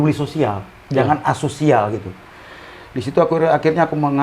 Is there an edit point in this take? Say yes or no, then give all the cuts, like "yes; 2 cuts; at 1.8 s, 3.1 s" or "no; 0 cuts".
no; 0 cuts